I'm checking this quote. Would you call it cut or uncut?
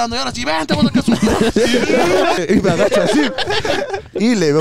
cut